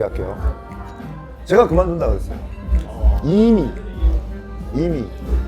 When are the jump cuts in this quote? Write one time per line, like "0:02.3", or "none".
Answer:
none